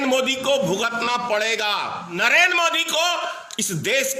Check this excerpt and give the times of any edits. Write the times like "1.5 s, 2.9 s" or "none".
2.2 s